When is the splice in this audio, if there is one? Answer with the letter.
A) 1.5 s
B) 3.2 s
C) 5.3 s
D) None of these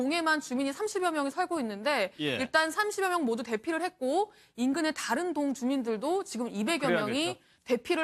B